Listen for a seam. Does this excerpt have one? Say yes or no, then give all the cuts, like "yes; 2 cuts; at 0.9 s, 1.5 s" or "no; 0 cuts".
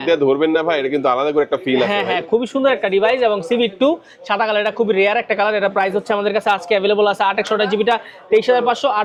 no; 0 cuts